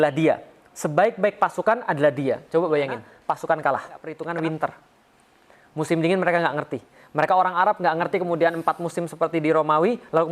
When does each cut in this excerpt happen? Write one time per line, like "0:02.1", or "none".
0:03.1
0:04.1